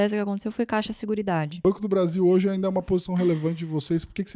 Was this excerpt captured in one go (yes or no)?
no